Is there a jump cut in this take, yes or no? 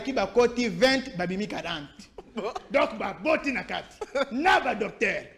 no